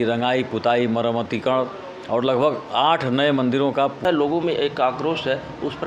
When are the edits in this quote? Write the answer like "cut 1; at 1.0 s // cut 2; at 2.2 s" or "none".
cut 1; at 4.0 s